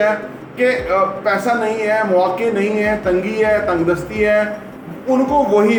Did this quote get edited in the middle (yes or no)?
no